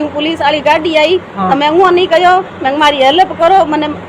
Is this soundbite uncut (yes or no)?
yes